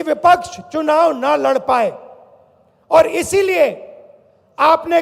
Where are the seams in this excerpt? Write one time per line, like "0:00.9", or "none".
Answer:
none